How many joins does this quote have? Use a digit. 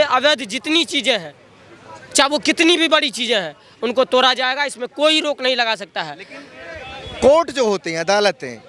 0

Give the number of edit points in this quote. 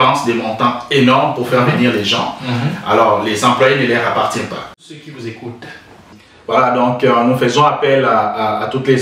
1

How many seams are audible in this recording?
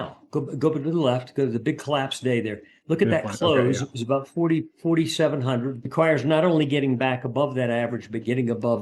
2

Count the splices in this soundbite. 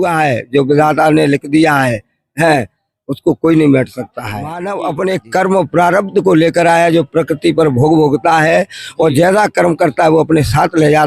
1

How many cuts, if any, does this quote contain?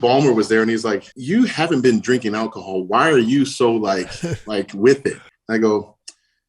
2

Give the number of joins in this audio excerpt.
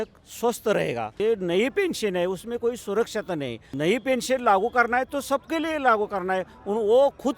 2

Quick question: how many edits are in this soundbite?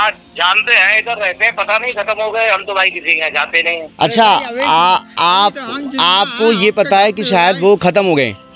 0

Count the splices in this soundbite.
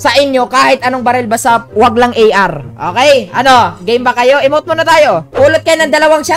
1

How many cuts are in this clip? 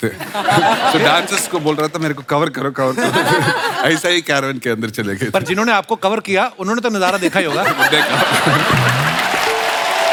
0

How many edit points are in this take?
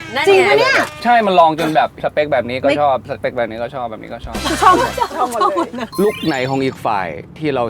3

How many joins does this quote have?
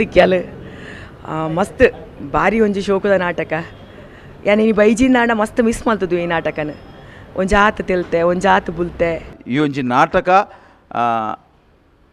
1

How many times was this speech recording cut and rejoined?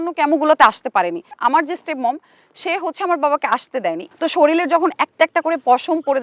2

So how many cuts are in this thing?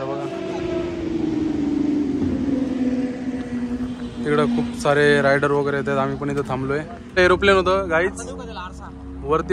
1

